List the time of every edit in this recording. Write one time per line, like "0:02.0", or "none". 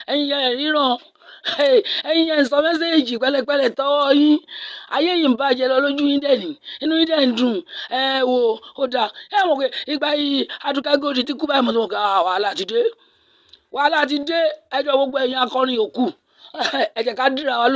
none